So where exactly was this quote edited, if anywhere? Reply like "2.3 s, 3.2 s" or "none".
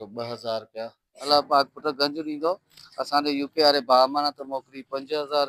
1.3 s